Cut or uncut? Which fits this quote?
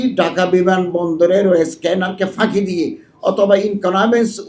uncut